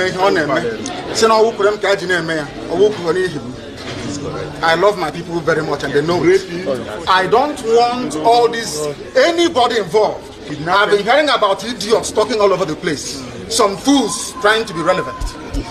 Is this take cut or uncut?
uncut